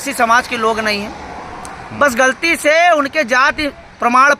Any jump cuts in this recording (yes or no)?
no